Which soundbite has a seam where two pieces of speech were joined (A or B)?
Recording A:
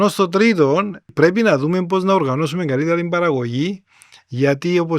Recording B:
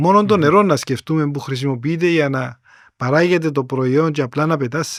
A